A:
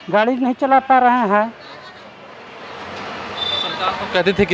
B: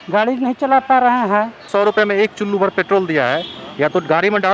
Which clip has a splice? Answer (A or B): B